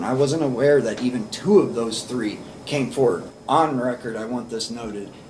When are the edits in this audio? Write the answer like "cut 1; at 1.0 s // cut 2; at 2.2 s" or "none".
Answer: cut 1; at 3.2 s